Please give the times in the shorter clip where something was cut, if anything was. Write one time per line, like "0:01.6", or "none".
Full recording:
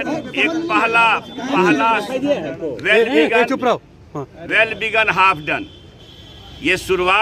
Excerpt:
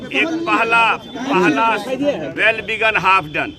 0:02.3